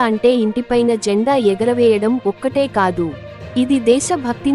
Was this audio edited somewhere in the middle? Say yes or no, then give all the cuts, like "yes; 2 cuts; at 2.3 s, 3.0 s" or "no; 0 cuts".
no; 0 cuts